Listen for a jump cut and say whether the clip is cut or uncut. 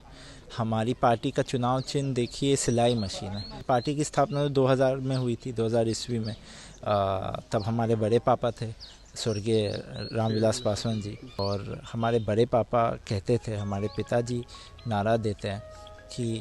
cut